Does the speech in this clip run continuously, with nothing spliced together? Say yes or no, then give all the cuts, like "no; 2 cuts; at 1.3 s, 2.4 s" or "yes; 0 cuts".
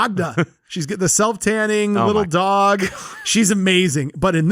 yes; 0 cuts